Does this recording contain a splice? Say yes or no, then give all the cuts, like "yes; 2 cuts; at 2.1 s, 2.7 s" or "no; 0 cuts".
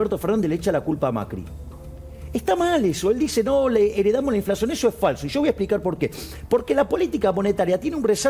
no; 0 cuts